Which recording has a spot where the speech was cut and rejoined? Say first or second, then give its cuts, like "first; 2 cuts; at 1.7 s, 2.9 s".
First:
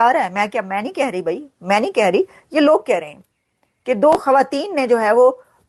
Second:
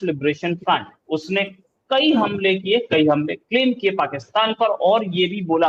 second; 1 cut; at 0.9 s